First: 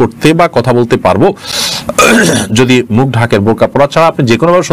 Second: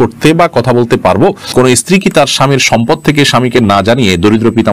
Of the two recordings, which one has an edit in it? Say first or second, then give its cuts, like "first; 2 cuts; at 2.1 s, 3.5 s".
second; 1 cut; at 1.8 s